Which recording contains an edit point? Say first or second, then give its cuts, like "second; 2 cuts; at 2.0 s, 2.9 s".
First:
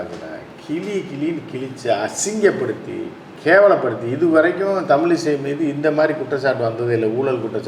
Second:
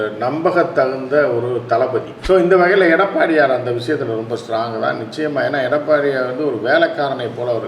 second; 1 cut; at 2.1 s